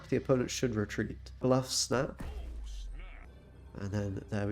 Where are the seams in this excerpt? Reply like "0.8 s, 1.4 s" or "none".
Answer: 1.4 s, 3.3 s